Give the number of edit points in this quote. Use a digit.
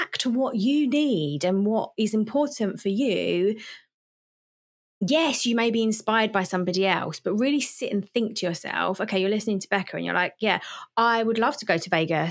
0